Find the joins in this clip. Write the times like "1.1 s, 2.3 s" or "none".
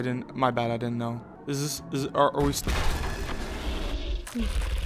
1.3 s